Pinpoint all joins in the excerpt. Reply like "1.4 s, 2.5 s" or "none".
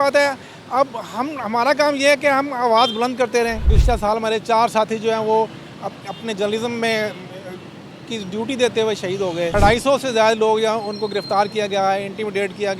3.7 s, 9.5 s